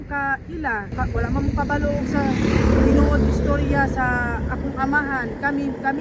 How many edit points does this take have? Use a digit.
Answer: 1